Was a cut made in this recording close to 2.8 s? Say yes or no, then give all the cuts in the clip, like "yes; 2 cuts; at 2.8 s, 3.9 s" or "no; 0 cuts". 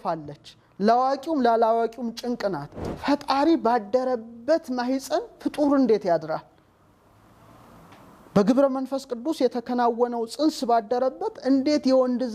yes; 1 cut; at 2.8 s